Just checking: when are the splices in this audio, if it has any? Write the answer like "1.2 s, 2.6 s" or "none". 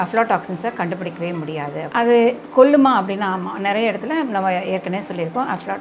1.9 s